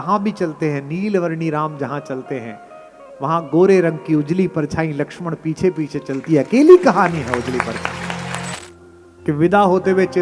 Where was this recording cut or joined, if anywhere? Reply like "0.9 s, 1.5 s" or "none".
8.5 s